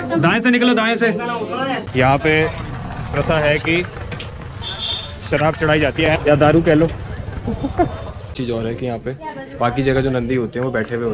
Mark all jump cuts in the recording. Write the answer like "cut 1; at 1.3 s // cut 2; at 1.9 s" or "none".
cut 1; at 1.8 s // cut 2; at 6.1 s // cut 3; at 8.3 s